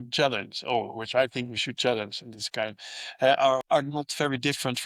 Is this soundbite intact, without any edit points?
yes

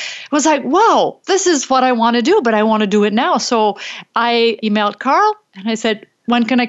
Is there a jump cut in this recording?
yes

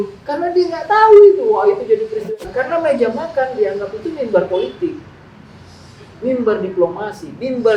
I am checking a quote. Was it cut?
yes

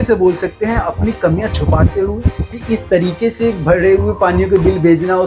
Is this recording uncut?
no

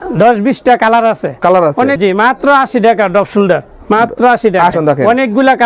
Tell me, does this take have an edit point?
yes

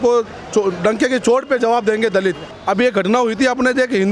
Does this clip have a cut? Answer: yes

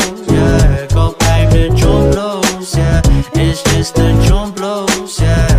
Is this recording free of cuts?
no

